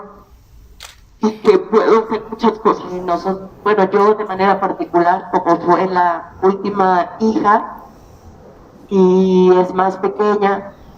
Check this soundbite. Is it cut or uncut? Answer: cut